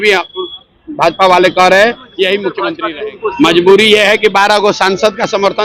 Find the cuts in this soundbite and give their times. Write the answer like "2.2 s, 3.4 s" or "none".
2.7 s